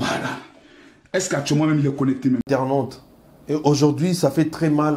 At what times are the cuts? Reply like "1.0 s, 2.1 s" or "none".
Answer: 2.4 s